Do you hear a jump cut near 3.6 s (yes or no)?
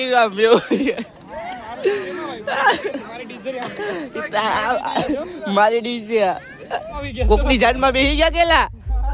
no